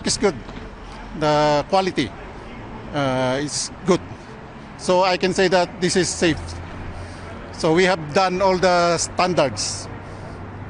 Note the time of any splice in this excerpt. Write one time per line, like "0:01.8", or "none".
none